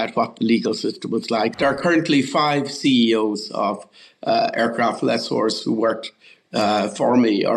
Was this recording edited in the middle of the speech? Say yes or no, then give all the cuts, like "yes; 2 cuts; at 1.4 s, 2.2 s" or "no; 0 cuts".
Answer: yes; 1 cut; at 1.5 s